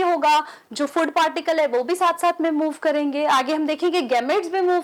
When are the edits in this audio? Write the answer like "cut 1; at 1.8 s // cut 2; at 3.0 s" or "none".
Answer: none